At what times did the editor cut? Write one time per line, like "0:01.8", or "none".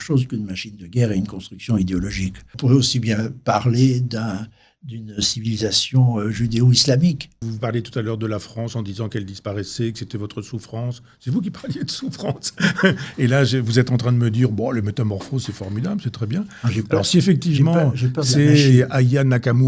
0:02.5
0:07.5